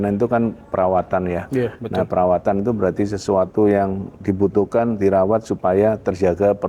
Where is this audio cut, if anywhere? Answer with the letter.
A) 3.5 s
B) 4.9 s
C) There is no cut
C